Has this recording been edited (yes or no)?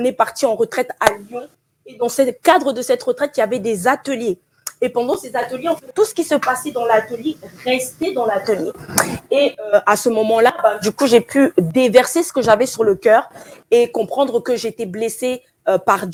no